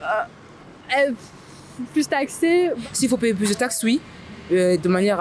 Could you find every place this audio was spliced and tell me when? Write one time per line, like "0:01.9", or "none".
0:02.8